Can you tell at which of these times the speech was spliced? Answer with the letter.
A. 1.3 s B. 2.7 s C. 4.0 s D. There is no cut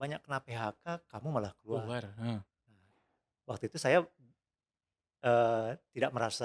D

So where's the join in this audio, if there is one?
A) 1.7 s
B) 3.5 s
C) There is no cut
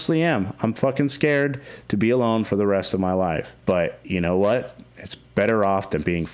B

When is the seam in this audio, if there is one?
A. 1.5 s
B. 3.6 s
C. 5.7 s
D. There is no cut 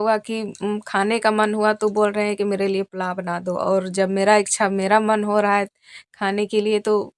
D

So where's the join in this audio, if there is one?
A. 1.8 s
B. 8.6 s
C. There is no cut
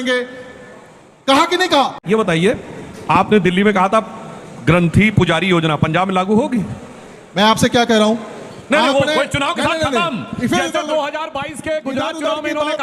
A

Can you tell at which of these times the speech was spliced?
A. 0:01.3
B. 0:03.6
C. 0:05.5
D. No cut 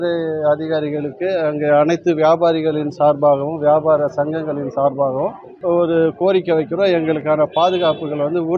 C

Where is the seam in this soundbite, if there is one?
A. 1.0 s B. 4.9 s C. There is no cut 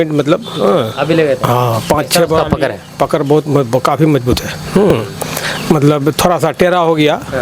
C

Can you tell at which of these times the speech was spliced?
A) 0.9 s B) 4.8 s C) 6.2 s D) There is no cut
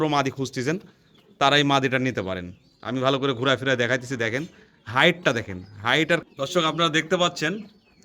C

